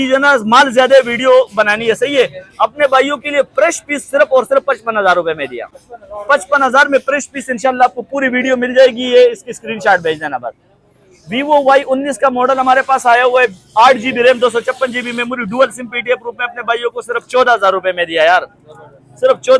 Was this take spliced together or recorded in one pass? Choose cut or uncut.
uncut